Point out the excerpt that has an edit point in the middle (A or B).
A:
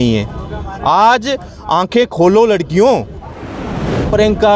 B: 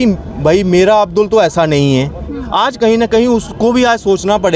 A